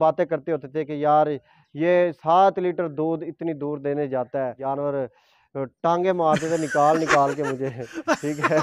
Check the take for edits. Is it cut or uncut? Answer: cut